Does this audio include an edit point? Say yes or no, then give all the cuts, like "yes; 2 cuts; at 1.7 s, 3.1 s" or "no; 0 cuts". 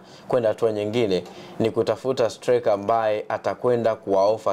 no; 0 cuts